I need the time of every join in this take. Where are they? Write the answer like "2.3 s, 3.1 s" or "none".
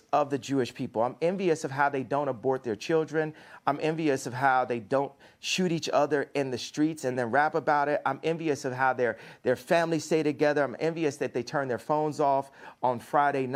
none